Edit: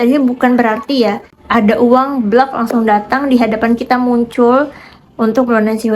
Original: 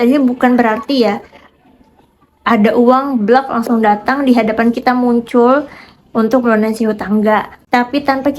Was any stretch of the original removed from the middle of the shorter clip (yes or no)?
yes